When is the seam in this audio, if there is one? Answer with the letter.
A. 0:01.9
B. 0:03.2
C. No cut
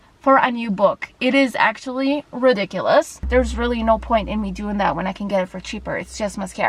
B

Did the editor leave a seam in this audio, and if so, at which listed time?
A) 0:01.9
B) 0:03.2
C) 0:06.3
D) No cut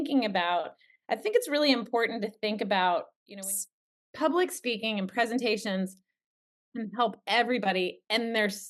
B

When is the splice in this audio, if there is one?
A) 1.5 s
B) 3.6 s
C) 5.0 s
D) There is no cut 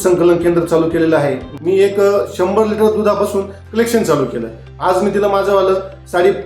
A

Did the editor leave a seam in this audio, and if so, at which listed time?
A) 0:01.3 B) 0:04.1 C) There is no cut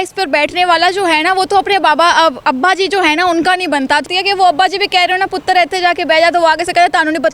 B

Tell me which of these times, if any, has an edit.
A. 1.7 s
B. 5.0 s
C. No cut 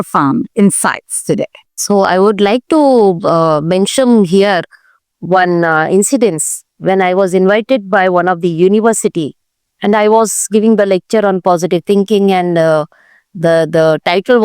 A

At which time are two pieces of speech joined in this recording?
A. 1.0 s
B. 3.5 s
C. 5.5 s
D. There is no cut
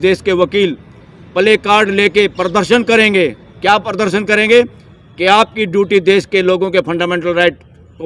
D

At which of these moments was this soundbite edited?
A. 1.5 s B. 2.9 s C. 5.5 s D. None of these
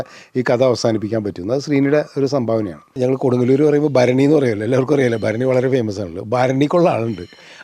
B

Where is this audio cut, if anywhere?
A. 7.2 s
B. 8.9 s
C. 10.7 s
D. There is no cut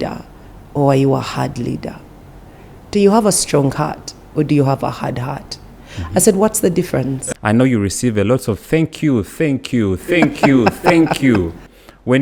A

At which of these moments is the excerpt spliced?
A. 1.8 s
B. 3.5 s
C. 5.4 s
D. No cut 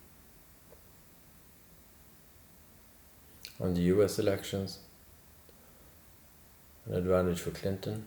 A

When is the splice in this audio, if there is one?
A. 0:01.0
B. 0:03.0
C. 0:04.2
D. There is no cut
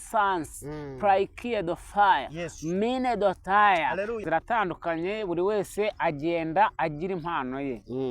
C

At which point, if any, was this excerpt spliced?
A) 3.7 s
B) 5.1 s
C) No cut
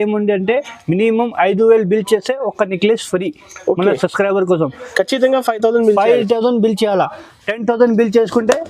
C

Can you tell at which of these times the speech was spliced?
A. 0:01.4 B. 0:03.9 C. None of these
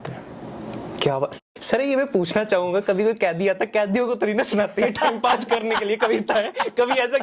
A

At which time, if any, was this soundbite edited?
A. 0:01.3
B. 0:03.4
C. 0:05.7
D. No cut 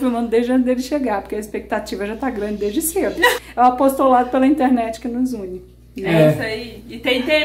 B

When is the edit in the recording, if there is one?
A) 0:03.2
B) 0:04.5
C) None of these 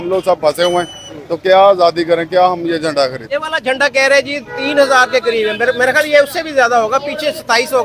A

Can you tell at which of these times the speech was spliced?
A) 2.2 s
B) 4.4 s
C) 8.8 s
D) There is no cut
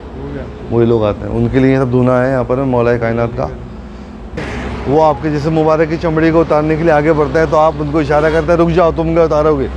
B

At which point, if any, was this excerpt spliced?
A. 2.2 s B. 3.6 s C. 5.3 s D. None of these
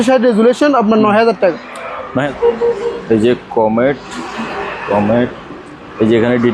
A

